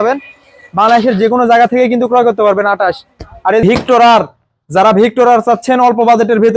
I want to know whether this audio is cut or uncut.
cut